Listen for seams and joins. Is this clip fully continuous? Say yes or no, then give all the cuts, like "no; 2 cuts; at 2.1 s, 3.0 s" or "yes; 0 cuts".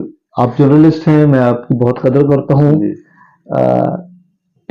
yes; 0 cuts